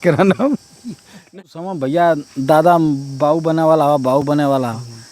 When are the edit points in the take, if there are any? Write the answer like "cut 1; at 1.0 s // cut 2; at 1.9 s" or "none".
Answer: cut 1; at 1.3 s